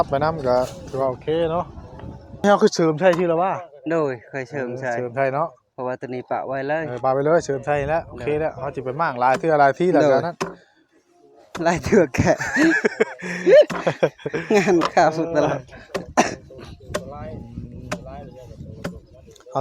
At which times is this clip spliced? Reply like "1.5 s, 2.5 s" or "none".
2.4 s